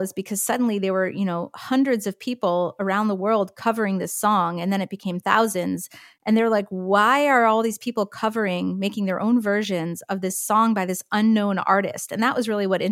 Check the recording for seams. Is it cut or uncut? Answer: uncut